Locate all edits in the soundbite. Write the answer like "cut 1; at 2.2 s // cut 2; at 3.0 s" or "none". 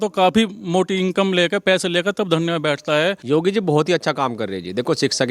cut 1; at 3.2 s